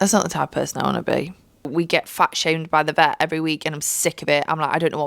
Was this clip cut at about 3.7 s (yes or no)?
no